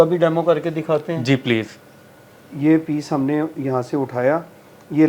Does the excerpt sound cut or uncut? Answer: uncut